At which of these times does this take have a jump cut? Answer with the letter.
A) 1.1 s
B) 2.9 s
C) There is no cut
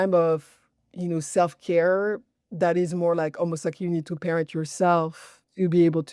C